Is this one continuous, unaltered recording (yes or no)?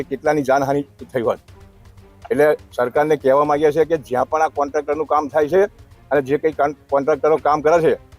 yes